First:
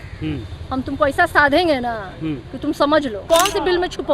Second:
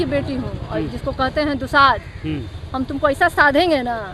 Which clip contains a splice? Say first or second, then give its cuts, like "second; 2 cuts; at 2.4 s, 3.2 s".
first; 1 cut; at 3.2 s